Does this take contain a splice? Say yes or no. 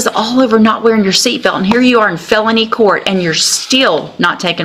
no